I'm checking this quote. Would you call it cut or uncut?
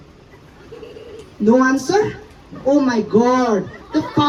uncut